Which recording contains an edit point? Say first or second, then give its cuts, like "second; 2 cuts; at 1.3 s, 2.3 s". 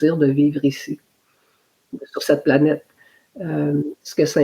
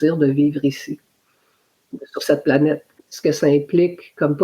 second; 1 cut; at 3.1 s